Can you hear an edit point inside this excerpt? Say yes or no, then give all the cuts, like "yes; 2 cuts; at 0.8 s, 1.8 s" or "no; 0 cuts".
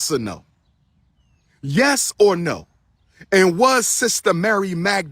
no; 0 cuts